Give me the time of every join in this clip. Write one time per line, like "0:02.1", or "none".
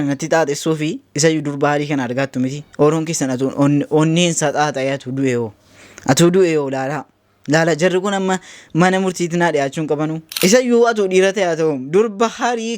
0:02.6
0:10.2